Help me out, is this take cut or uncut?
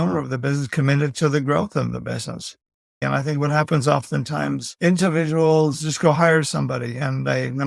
cut